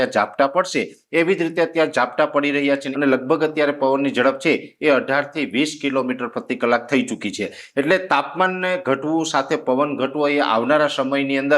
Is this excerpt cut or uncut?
cut